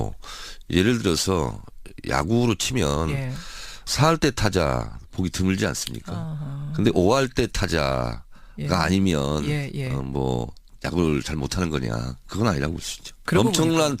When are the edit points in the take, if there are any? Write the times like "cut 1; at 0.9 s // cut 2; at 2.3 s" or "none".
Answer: cut 1; at 6.2 s